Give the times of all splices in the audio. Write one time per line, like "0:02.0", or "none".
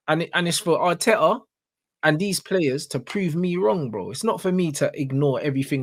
none